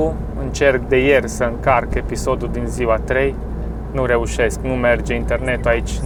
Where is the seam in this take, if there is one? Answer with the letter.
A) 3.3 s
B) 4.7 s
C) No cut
C